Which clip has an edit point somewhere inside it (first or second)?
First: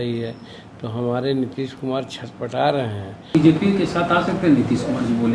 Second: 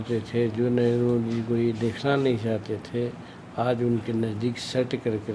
first